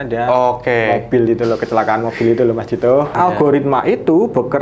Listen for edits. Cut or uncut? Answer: cut